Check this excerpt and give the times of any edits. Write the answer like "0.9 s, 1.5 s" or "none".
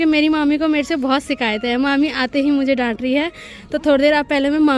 none